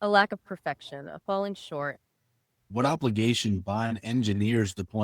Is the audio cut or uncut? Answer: cut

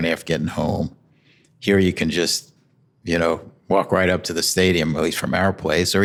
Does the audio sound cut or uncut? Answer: uncut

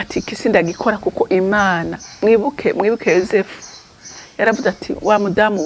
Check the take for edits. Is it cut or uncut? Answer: uncut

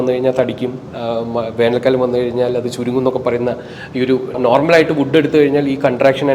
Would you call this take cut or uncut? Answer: cut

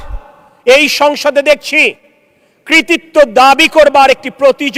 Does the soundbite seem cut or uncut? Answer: uncut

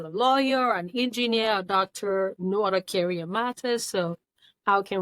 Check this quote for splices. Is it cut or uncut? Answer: cut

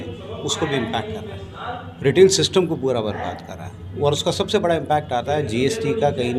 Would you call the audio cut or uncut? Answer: uncut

